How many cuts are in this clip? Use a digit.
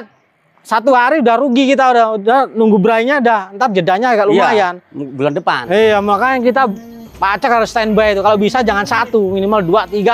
0